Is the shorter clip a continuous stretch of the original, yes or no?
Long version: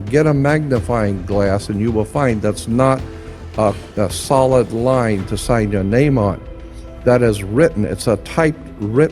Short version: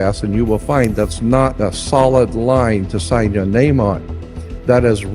no